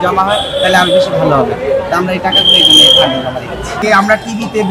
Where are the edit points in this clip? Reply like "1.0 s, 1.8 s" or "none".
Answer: 3.8 s

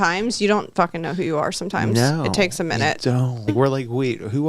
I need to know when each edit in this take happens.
3.5 s

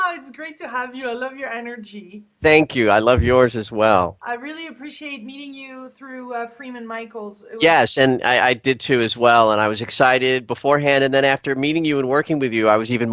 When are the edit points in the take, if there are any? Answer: none

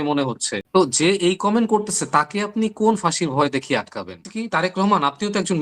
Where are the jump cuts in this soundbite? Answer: 4.2 s

